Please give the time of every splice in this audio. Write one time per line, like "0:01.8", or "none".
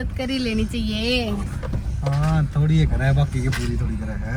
none